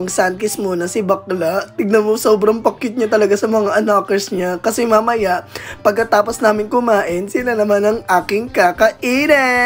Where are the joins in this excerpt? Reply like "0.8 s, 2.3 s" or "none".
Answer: none